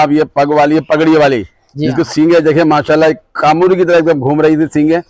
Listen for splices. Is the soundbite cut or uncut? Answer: uncut